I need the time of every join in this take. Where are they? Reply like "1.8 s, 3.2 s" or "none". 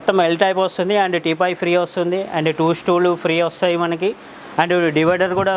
none